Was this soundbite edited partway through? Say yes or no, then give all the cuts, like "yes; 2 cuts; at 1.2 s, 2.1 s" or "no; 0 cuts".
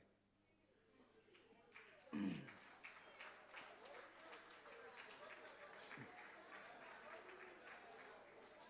no; 0 cuts